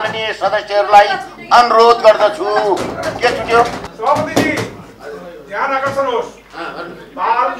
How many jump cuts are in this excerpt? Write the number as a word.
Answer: one